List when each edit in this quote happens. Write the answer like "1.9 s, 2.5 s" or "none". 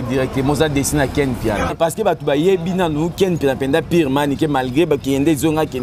1.7 s